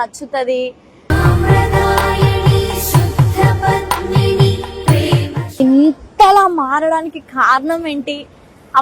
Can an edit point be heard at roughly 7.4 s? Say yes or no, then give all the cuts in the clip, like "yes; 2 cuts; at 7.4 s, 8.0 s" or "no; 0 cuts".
no; 1 cut; at 5.6 s